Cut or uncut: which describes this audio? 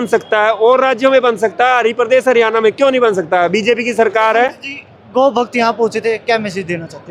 uncut